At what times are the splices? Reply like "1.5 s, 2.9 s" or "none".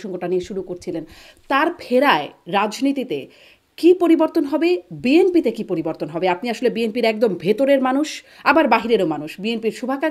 none

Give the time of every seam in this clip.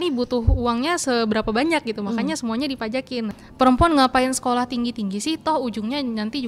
3.3 s

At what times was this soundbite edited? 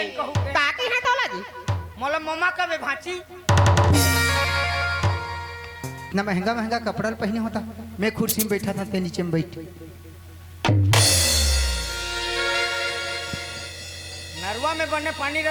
6.1 s

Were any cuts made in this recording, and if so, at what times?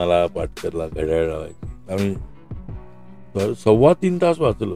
none

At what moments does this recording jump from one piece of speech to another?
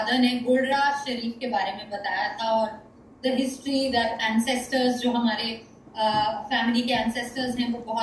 none

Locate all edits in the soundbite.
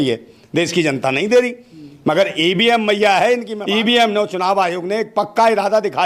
3.5 s

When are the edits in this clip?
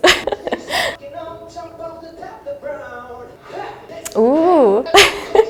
none

